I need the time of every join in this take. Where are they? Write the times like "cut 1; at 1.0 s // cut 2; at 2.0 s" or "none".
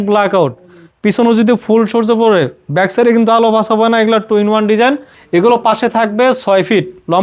cut 1; at 5.1 s